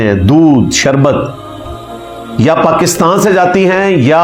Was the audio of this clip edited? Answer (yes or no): no